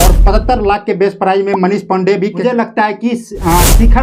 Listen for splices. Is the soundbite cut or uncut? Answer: cut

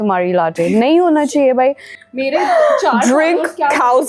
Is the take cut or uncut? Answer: uncut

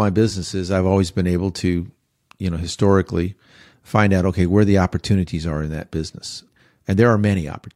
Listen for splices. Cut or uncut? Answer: cut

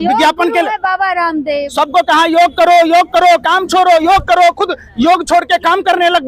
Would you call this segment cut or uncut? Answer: uncut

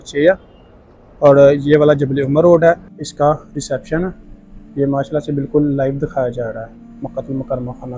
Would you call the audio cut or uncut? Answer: cut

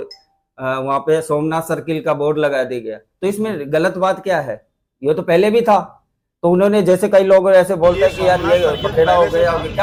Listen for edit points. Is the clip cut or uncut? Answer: uncut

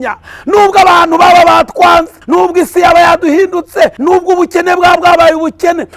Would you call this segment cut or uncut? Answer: cut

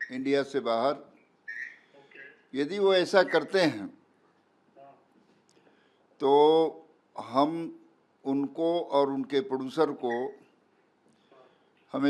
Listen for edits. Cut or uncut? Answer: uncut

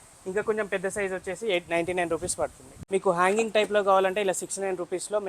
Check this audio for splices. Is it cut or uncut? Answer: cut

